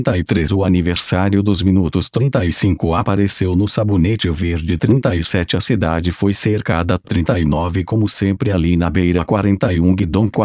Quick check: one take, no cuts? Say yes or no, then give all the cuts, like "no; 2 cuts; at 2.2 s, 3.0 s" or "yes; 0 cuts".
yes; 0 cuts